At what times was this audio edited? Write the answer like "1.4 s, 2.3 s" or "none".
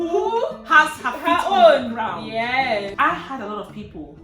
2.9 s